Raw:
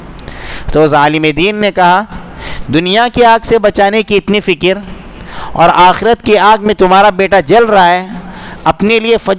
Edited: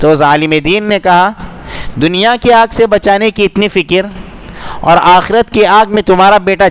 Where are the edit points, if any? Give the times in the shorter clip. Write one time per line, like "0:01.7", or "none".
none